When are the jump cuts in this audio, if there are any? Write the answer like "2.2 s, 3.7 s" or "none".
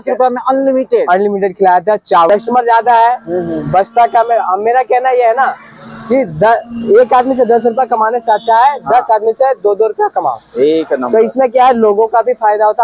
2.3 s